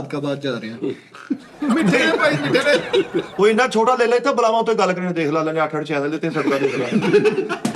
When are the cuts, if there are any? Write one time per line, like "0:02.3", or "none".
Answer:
0:03.3

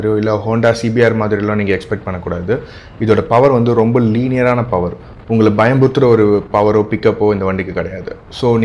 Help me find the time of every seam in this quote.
none

